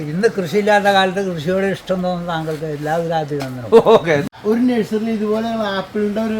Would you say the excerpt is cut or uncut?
cut